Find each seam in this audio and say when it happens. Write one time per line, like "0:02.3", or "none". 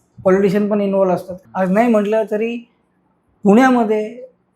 0:01.3